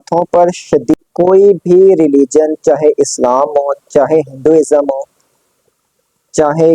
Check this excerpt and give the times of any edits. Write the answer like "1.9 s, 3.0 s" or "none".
0.9 s

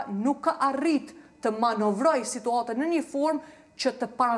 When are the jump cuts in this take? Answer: none

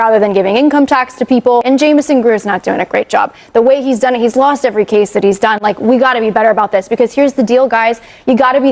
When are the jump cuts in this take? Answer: 1.7 s

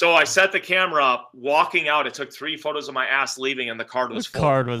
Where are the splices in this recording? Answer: none

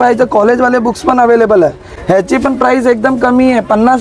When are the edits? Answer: none

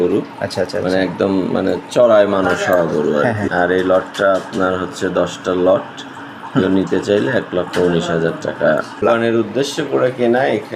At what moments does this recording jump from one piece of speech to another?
3.5 s, 9.0 s

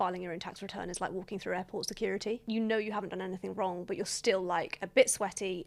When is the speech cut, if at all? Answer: none

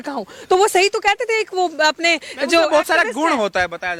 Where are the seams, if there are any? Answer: none

